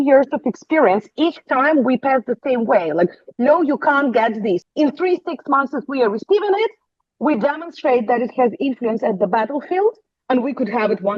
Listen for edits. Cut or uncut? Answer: cut